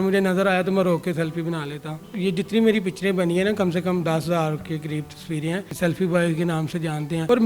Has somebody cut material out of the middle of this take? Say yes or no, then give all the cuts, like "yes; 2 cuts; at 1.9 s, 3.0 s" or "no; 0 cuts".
yes; 2 cuts; at 2.0 s, 5.7 s